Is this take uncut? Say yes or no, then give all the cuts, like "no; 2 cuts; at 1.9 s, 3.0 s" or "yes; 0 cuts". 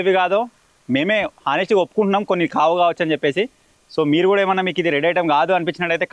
yes; 0 cuts